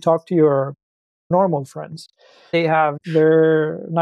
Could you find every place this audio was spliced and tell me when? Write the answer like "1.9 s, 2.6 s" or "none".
1.3 s, 2.5 s